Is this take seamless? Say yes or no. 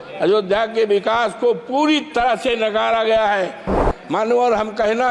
no